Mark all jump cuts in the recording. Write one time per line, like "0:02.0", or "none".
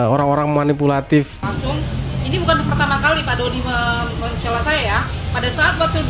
0:01.3